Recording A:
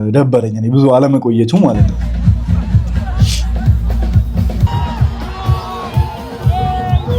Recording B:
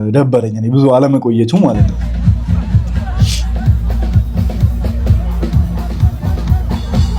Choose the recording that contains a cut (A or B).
A